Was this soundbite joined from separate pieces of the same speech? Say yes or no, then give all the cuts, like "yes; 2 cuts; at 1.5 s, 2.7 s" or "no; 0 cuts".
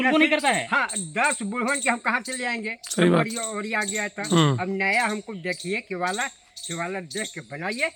no; 0 cuts